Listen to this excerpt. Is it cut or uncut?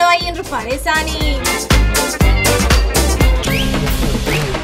cut